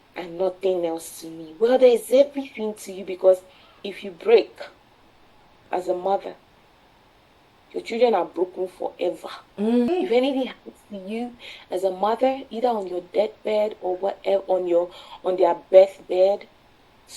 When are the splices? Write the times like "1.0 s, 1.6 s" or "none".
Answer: 3.6 s, 9.9 s